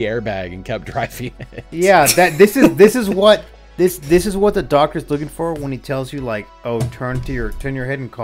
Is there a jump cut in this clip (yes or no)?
no